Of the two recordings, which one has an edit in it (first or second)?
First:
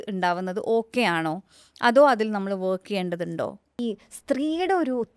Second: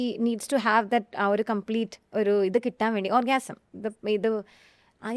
first